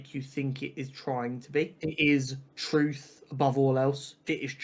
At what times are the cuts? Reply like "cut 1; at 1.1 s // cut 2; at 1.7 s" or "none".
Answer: cut 1; at 1.7 s